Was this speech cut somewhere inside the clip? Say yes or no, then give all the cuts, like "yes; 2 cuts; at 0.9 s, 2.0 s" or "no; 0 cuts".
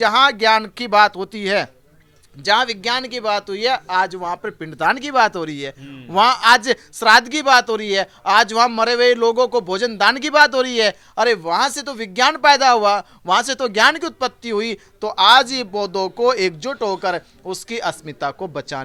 no; 0 cuts